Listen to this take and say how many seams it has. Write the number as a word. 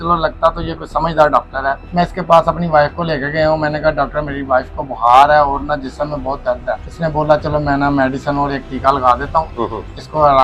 two